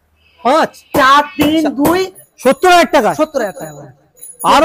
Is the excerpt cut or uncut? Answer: cut